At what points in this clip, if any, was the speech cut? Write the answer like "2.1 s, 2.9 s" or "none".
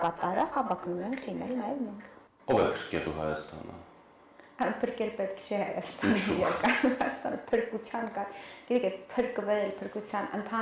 none